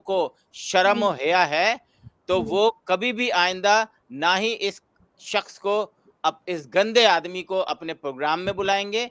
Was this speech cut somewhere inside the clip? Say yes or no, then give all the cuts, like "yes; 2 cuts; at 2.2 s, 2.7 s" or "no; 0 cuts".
no; 0 cuts